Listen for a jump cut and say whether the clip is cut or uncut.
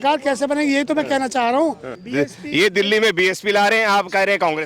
cut